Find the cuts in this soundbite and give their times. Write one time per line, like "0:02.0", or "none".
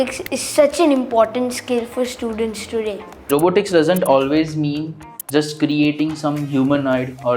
0:03.3